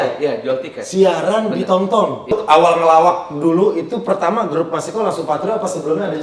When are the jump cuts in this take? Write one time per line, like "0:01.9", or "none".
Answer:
0:02.4